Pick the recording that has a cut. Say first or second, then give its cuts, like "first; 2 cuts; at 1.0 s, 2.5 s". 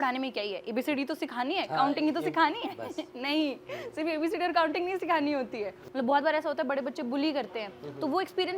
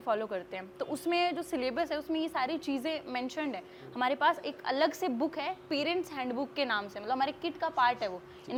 first; 1 cut; at 5.8 s